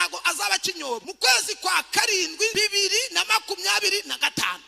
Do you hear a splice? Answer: yes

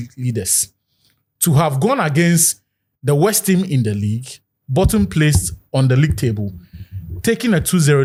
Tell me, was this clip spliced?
no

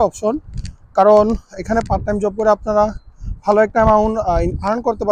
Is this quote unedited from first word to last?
yes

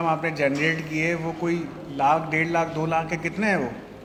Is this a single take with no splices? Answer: yes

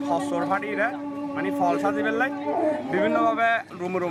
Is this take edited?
no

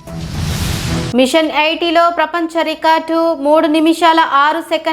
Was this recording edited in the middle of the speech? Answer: yes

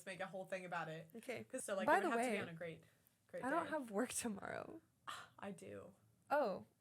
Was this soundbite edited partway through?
yes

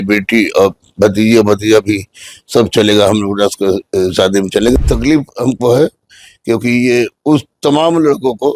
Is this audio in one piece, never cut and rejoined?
no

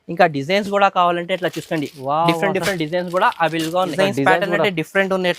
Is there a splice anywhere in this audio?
yes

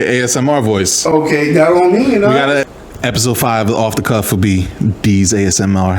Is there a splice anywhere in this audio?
yes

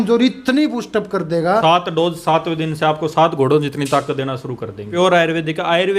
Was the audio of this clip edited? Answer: yes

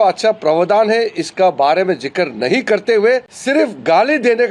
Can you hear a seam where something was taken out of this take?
yes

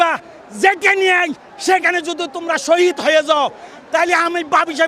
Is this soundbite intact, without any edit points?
yes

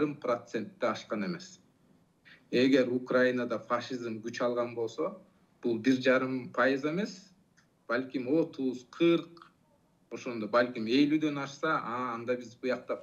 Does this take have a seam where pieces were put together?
no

